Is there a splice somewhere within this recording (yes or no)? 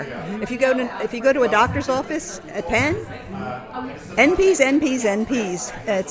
no